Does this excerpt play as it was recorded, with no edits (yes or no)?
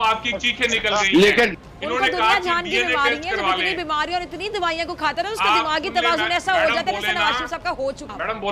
yes